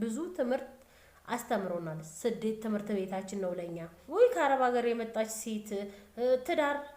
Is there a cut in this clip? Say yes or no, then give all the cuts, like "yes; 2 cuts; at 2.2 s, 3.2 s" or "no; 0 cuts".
no; 0 cuts